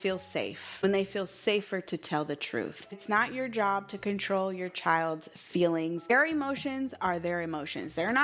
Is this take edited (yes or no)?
yes